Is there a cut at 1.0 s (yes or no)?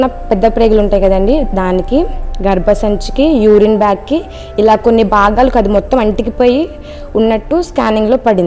no